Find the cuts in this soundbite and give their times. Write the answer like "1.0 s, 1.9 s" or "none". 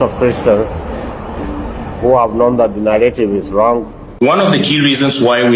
4.0 s